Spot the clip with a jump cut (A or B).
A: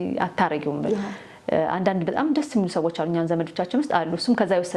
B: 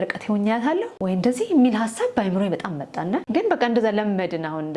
B